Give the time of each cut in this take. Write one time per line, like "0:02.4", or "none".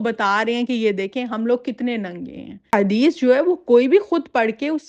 0:02.7